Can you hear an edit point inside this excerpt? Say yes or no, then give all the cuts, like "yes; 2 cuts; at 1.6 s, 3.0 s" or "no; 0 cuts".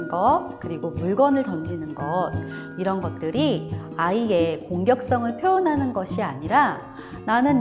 no; 0 cuts